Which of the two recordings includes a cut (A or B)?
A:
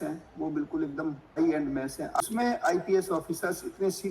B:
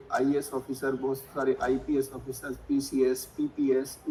A